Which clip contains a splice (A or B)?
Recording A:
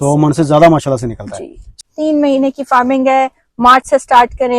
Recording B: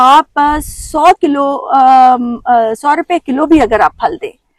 A